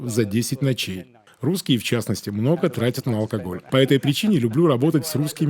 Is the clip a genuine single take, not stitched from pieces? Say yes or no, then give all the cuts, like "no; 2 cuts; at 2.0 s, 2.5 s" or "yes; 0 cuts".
no; 2 cuts; at 1.2 s, 3.6 s